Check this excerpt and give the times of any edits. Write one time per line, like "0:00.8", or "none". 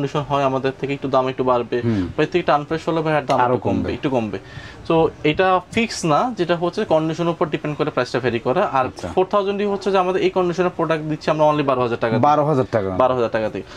none

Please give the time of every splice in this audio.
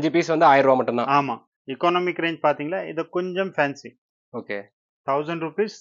0:01.5

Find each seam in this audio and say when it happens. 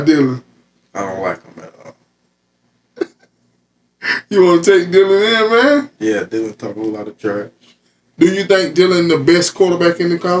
none

